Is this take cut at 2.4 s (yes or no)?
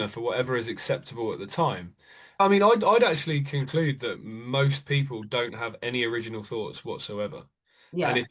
yes